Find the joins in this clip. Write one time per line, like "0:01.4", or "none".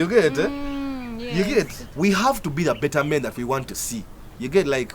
0:01.8